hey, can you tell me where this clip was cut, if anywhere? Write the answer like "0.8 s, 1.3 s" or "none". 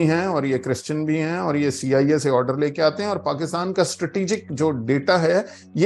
none